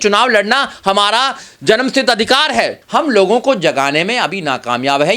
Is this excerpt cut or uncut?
cut